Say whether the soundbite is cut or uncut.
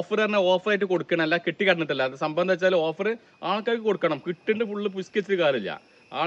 uncut